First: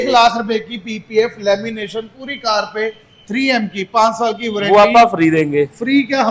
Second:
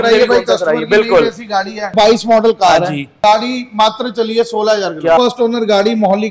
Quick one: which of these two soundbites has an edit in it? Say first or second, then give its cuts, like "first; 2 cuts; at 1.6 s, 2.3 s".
second; 3 cuts; at 1.9 s, 3.1 s, 5.2 s